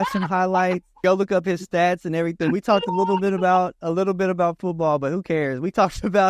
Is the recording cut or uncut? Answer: cut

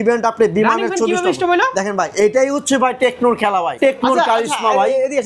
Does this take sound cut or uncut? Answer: cut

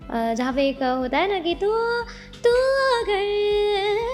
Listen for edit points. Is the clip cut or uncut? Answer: uncut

